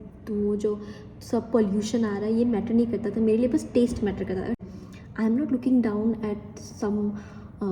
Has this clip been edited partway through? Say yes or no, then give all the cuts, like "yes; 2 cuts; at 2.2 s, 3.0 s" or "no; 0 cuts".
yes; 1 cut; at 4.6 s